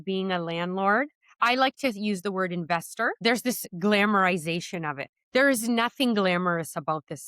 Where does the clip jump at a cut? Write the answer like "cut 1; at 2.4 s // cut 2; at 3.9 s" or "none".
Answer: cut 1; at 3.2 s